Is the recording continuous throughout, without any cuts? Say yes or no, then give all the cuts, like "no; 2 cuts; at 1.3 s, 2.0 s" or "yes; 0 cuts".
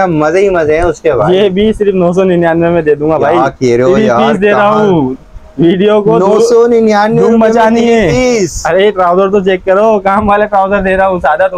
yes; 0 cuts